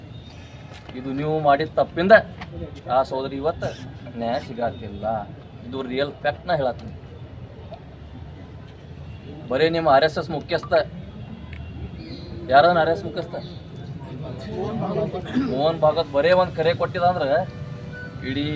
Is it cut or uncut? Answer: uncut